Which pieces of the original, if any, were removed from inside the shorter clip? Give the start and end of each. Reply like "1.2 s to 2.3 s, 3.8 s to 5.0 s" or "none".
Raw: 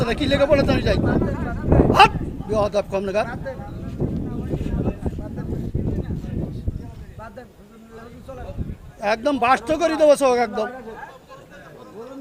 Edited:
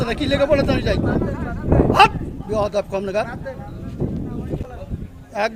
4.6 s to 8.3 s